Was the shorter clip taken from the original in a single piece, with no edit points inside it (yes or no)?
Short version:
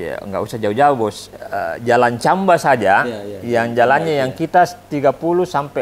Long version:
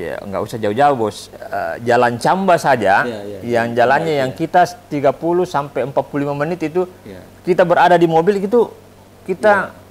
yes